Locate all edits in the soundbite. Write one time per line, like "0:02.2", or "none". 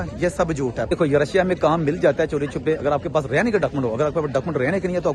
0:00.9